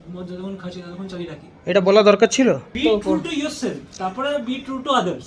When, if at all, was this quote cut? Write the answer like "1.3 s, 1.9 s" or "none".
2.7 s